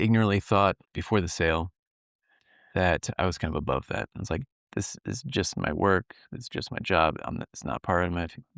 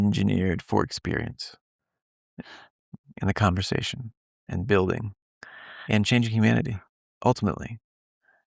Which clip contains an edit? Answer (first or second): first